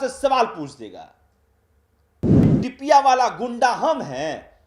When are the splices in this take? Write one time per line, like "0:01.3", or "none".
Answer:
0:02.5